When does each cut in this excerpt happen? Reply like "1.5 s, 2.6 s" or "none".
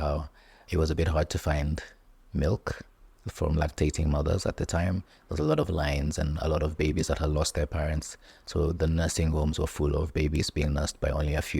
none